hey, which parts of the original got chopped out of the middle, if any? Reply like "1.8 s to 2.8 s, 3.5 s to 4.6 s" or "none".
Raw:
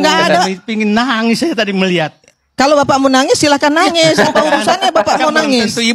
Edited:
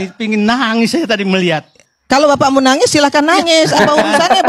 none